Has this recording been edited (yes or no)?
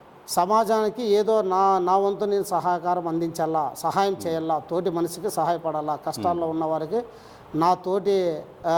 no